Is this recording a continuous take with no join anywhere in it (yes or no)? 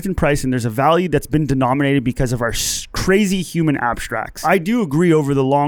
no